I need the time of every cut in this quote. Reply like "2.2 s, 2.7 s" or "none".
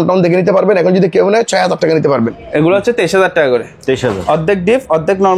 2.4 s